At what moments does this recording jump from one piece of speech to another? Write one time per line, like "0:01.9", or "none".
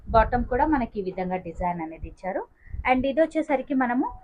none